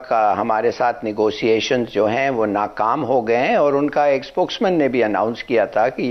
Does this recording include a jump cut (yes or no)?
no